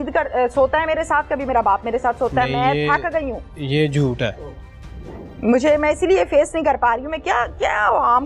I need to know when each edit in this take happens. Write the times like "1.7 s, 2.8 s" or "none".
none

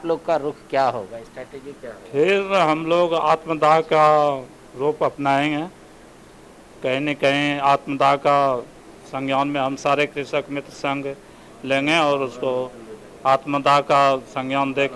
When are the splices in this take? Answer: none

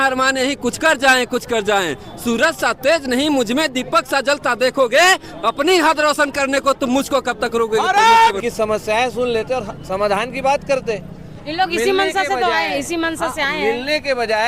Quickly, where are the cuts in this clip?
8.4 s

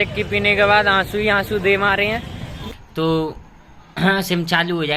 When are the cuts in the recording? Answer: 2.6 s

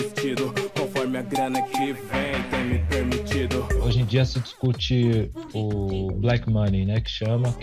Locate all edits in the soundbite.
none

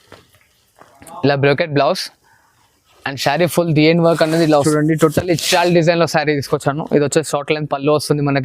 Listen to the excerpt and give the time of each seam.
4.6 s

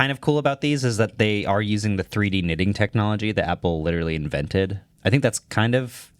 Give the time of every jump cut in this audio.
4.9 s

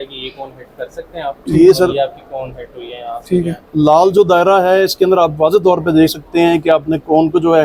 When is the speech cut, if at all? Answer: none

